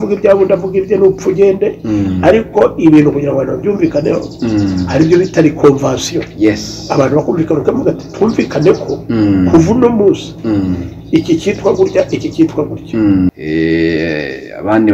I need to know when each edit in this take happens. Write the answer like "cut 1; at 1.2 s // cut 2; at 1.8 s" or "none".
cut 1; at 13.4 s